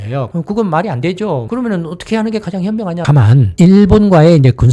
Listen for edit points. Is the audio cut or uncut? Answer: cut